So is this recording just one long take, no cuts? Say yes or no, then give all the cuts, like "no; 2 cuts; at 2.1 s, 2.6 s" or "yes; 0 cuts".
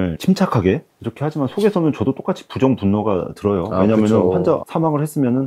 yes; 0 cuts